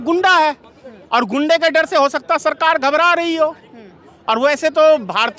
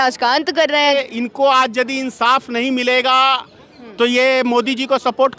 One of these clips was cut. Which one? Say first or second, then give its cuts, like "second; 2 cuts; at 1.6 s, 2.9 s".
second; 1 cut; at 0.9 s